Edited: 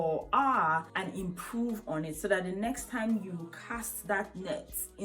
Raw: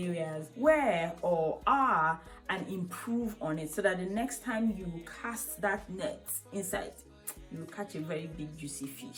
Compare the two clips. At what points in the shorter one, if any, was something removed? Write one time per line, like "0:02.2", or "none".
0:00.9